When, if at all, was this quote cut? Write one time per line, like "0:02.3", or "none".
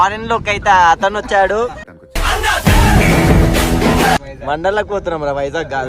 0:01.7
0:04.2

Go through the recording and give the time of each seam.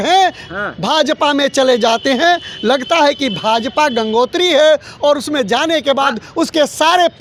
none

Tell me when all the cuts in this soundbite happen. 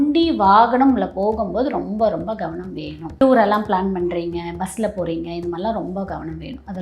0:03.1

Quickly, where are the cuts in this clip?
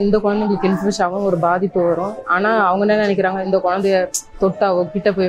0:02.2
0:03.4

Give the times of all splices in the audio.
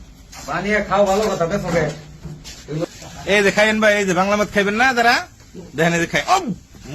0:02.9

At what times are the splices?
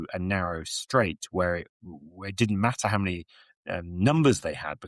none

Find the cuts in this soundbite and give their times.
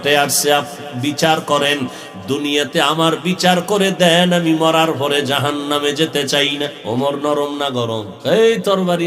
0:06.8
0:08.1

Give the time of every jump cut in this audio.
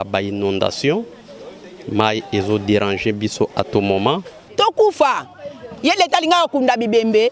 0:04.4

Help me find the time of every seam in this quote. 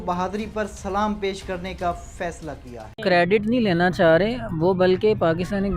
0:03.0

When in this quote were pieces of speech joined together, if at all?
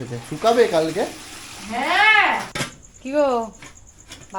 0:02.6

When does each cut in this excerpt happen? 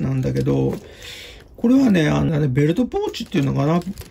0:02.3

